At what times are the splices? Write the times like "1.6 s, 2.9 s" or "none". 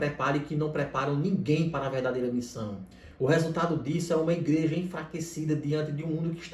none